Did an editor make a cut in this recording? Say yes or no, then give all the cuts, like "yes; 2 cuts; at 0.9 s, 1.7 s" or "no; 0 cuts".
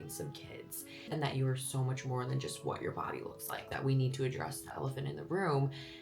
yes; 2 cuts; at 1.1 s, 3.7 s